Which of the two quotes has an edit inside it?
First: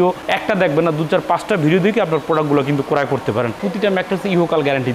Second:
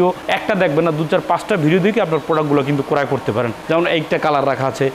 first; 1 cut; at 3.6 s

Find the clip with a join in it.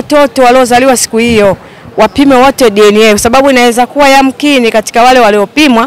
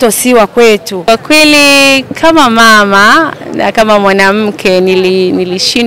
second; 1 cut; at 0.9 s

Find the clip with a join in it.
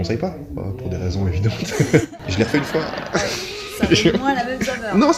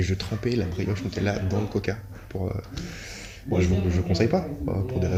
first; 1 cut; at 2.1 s

